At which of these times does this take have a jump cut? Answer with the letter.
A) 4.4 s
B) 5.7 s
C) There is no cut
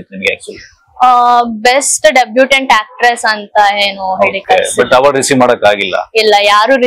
C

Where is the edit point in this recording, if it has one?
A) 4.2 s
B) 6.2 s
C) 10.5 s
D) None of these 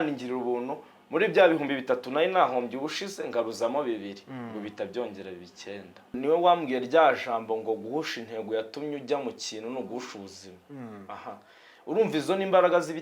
B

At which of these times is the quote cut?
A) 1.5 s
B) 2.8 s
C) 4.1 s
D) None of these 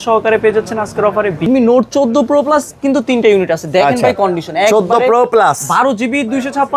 A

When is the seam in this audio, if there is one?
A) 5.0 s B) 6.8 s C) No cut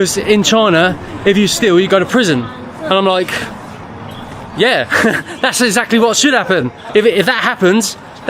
B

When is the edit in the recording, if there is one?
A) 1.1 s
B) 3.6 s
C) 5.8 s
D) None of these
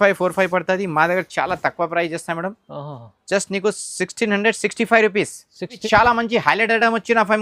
C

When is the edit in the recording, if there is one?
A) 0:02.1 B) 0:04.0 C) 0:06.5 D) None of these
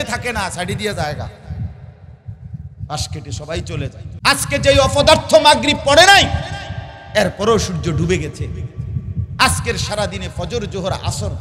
B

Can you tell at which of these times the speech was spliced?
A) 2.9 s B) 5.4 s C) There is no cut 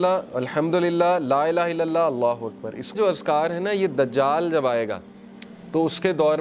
A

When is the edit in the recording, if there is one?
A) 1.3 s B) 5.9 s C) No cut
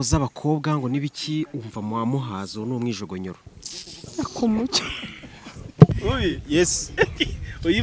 B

